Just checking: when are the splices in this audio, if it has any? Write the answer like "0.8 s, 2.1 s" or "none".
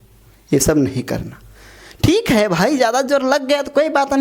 none